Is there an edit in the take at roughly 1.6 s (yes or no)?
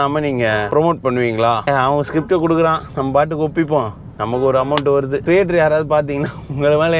yes